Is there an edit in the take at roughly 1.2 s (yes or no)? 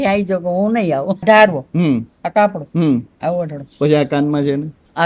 yes